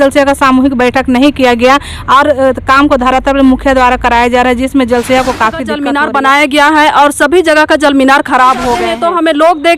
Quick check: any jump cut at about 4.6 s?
no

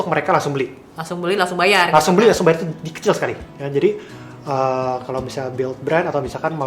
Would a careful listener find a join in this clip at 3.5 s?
yes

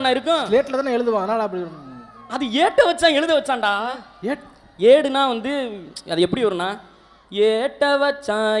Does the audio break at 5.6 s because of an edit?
no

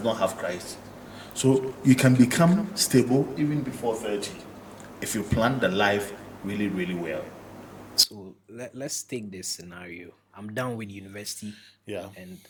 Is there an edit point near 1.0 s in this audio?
no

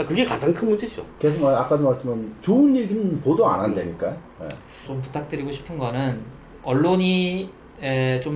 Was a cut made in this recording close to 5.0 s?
yes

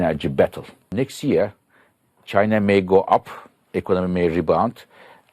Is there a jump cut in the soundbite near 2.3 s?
no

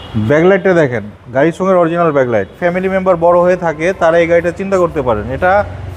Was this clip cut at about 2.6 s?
yes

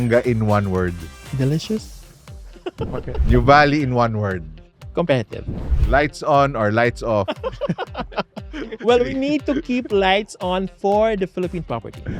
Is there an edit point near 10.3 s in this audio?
no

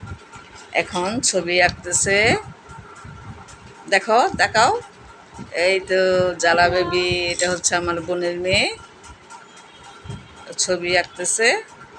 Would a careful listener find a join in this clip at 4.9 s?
no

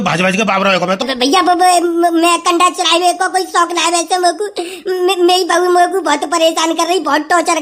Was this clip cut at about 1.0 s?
yes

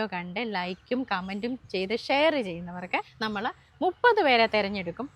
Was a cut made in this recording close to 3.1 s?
yes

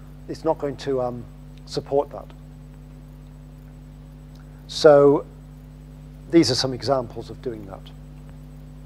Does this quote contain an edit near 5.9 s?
no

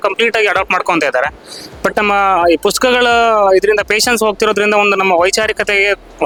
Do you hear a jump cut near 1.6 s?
no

